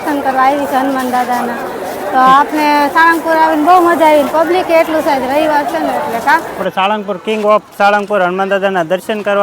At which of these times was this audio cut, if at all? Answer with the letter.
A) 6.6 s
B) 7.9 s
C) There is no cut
A